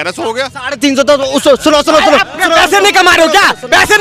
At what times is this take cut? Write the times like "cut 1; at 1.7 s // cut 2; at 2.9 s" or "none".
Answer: none